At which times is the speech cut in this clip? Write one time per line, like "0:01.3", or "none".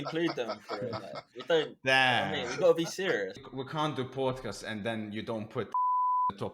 0:03.4